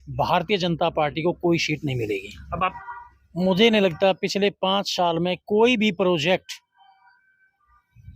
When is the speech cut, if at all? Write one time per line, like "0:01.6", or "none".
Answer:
0:02.8